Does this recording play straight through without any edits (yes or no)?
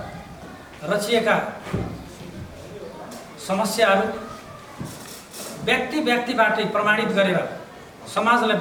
yes